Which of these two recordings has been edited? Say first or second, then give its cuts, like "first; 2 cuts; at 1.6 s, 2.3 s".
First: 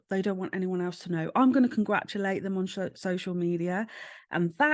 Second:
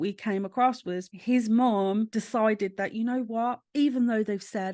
second; 3 cuts; at 1.1 s, 2.1 s, 3.6 s